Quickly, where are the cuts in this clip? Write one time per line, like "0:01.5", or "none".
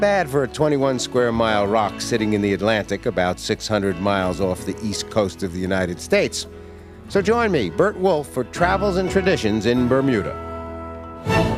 none